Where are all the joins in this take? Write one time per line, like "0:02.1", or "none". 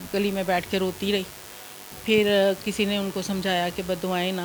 none